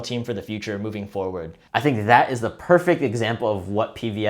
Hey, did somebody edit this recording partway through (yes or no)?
yes